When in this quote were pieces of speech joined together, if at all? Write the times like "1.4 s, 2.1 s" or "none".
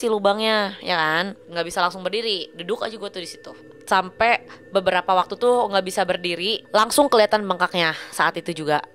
1.4 s, 3.7 s, 6.5 s